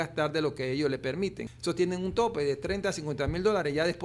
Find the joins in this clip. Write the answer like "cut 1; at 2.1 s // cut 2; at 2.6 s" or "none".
cut 1; at 1.5 s